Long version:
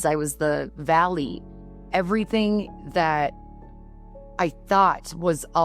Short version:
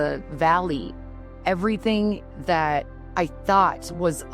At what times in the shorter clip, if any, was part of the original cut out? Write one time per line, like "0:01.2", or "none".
0:03.0